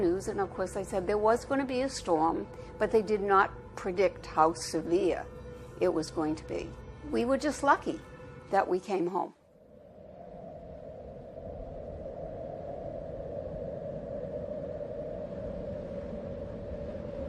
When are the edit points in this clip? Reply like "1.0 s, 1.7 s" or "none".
2.6 s